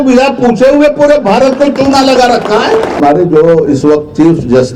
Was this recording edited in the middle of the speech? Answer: yes; 1 cut; at 3.0 s

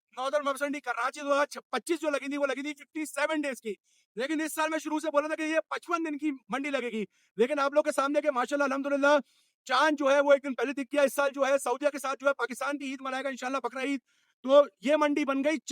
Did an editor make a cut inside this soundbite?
no; 0 cuts

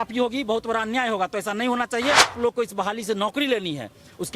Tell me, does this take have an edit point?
yes; 1 cut; at 2.3 s

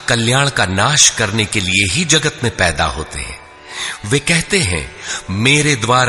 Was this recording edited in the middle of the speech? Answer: no; 0 cuts

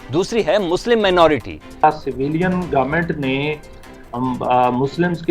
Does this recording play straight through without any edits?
no; 1 cut; at 1.8 s

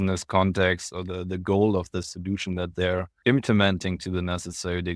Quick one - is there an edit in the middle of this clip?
yes; 2 cuts; at 2.1 s, 3.1 s

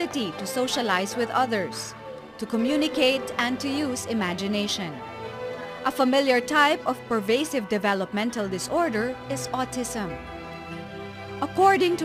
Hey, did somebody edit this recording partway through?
no; 0 cuts

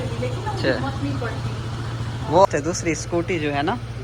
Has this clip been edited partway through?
yes; 1 cut; at 2.5 s

